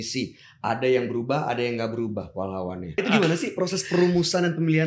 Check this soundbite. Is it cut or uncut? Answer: cut